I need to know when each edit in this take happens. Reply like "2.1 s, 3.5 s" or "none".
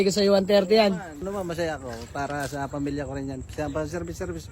1.1 s